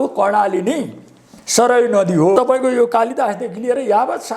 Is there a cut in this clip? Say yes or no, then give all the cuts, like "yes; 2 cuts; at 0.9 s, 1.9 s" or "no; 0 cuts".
yes; 1 cut; at 2.4 s